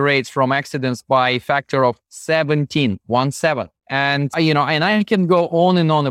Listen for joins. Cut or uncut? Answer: uncut